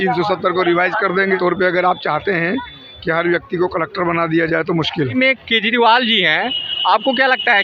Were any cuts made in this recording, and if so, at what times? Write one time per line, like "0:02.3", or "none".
0:01.4
0:05.1